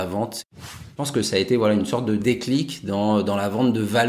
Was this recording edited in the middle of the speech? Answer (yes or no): yes